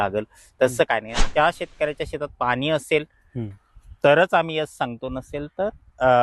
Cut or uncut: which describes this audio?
cut